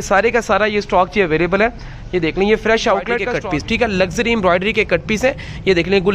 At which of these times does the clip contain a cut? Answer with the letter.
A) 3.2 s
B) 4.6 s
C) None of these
A